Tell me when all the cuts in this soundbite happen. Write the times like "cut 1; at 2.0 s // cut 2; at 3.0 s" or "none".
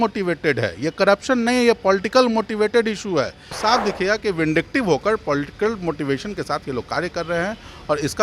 cut 1; at 3.5 s